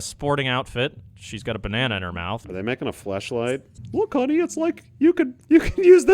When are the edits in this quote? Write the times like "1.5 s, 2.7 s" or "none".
2.5 s, 3.8 s

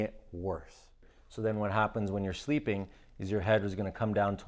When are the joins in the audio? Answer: 1.0 s

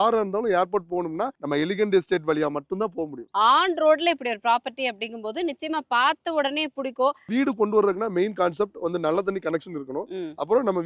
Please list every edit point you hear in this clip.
1.4 s, 3.2 s, 7.3 s

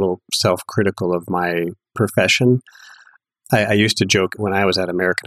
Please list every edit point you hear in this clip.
1.9 s, 4.4 s

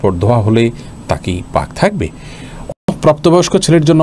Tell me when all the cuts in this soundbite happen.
2.9 s

